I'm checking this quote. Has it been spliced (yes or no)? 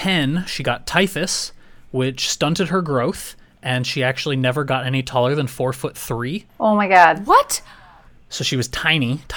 no